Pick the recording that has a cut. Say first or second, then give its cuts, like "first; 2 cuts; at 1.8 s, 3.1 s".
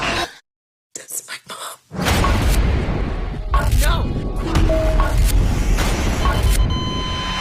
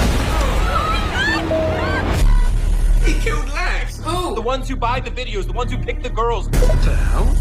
second; 2 cuts; at 1.5 s, 2.6 s